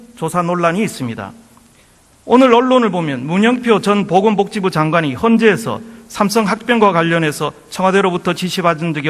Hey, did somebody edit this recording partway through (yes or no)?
yes